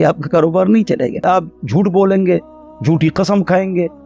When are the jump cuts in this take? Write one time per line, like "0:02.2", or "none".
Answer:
0:01.2